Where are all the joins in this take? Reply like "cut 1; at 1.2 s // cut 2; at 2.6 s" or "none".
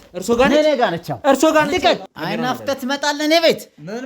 cut 1; at 2.1 s